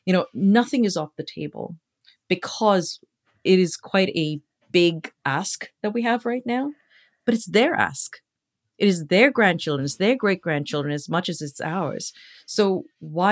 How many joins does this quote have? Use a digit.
1